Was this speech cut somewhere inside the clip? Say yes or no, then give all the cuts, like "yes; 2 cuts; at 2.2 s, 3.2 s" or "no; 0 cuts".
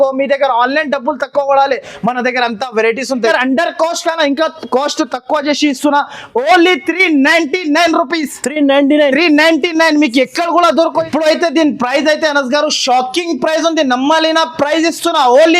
yes; 2 cuts; at 3.3 s, 11.0 s